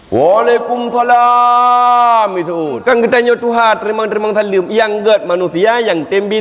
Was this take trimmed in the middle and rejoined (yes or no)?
yes